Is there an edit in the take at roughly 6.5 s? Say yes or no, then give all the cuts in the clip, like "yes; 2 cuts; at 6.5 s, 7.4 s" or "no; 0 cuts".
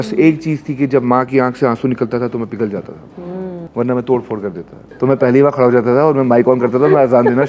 no; 2 cuts; at 3.6 s, 4.8 s